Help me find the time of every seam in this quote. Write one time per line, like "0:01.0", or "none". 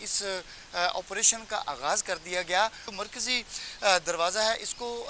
0:02.8